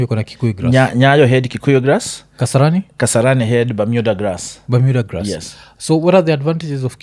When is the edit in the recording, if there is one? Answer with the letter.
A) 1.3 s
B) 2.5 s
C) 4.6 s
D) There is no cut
D